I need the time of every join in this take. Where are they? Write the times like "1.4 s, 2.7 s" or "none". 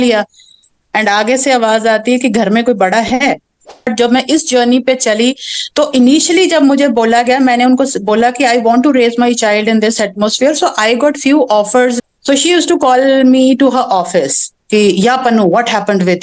3.9 s, 12.0 s